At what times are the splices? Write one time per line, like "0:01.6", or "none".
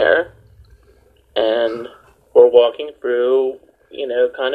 none